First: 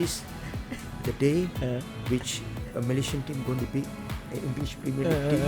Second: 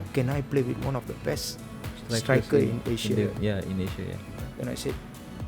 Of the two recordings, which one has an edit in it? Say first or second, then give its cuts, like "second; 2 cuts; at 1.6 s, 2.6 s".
second; 1 cut; at 4.4 s